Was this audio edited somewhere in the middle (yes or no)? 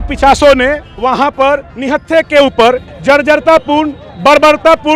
yes